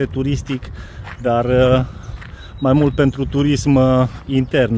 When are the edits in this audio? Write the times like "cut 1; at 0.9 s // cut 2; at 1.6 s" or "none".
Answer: none

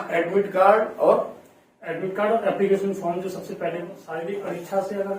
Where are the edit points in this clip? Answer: cut 1; at 4.0 s

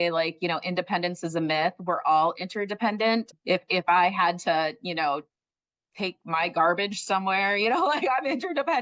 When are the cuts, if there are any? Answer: cut 1; at 3.3 s

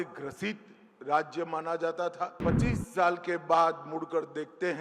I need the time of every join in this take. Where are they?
cut 1; at 2.4 s

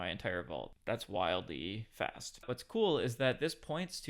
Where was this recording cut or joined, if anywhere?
cut 1; at 2.5 s

